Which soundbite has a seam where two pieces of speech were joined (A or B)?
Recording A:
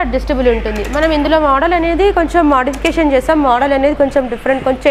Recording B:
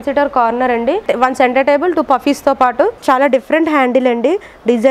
B